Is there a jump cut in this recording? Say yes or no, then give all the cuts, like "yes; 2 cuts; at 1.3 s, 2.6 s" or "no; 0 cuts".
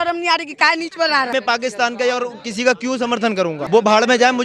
yes; 2 cuts; at 1.3 s, 3.6 s